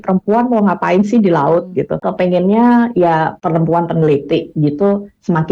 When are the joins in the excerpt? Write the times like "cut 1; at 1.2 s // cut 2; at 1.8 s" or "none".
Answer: cut 1; at 2.1 s // cut 2; at 3.4 s